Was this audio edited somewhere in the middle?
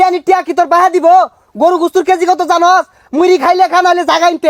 no; 0 cuts

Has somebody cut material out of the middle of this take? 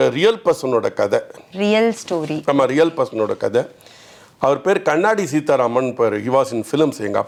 no; 0 cuts

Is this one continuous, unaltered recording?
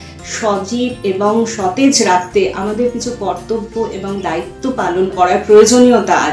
no; 1 cut; at 5.1 s

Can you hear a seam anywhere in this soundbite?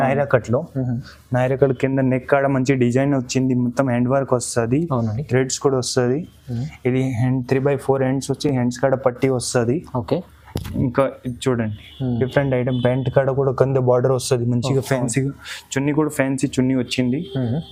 no; 0 cuts

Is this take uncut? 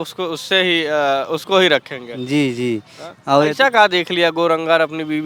yes; 0 cuts

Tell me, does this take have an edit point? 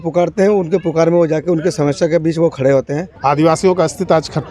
yes; 1 cut; at 3.0 s

